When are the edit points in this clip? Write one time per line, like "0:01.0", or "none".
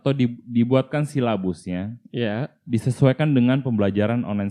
none